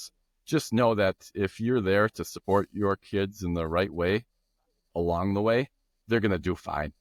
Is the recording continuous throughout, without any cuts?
yes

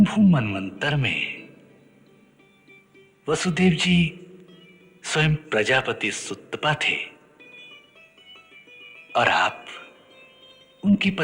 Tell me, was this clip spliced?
no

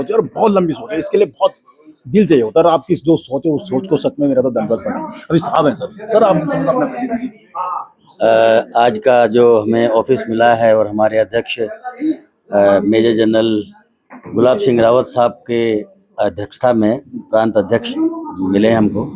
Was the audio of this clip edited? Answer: no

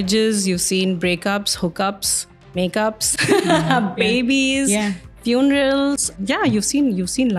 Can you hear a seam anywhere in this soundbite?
yes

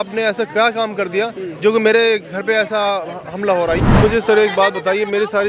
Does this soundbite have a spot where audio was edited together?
yes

